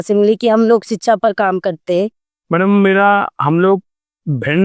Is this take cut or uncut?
uncut